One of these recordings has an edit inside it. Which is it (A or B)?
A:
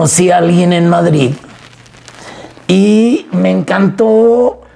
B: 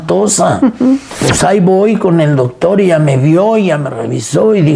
B